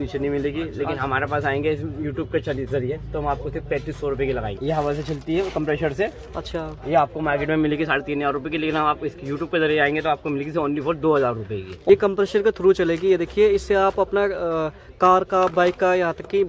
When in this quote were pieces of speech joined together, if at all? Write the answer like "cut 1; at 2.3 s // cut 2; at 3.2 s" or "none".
cut 1; at 4.5 s // cut 2; at 11.7 s